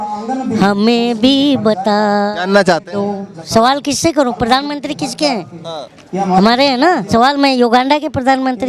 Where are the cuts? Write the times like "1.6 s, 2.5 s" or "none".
3.3 s, 7.0 s